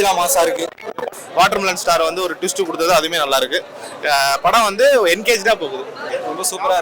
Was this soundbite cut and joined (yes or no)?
yes